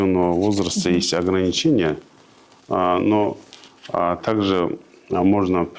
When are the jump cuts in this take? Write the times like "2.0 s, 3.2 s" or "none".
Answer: none